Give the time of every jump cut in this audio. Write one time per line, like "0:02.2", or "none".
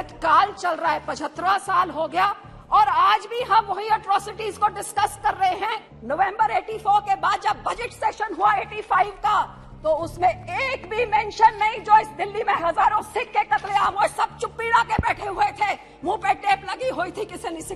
0:05.9